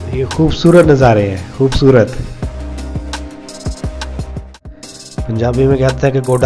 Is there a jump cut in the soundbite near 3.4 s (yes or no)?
no